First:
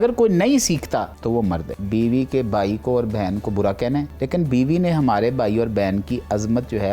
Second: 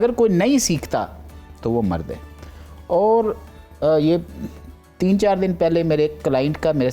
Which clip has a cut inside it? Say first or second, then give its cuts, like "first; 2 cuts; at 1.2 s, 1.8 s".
first; 2 cuts; at 1.6 s, 4.2 s